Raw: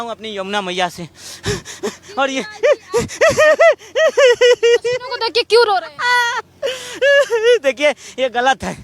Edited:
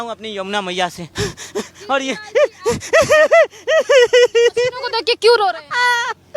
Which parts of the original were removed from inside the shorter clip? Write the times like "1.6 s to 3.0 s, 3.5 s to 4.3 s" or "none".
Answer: 1.0 s to 1.3 s